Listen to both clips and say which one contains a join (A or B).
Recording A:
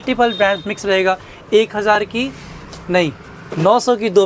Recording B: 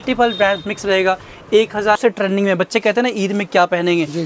B